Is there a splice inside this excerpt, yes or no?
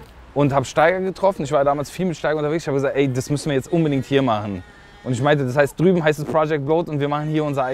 no